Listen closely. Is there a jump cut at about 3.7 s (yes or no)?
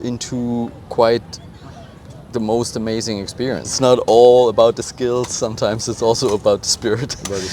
yes